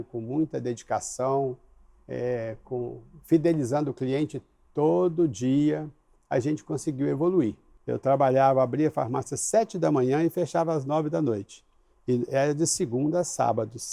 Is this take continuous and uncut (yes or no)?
no